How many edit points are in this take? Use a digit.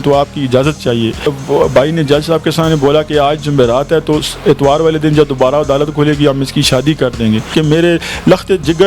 2